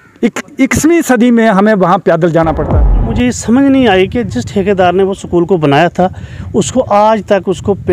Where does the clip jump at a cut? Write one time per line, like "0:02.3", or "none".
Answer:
0:03.1